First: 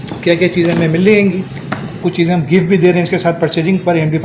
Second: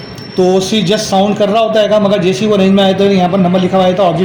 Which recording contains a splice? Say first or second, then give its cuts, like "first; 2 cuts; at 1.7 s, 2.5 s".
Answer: first; 1 cut; at 2.0 s